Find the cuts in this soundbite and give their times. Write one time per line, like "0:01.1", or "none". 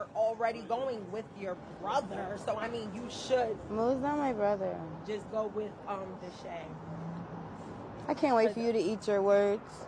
0:01.7